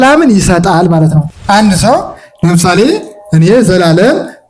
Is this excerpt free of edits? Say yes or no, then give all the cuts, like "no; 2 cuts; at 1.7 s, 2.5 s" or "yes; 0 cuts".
no; 1 cut; at 1.3 s